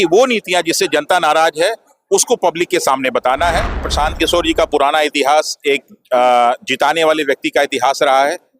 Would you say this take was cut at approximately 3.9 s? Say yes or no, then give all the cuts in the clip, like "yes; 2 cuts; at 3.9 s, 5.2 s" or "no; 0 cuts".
yes; 1 cut; at 3.9 s